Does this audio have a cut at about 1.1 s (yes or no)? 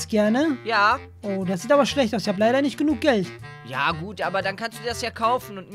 yes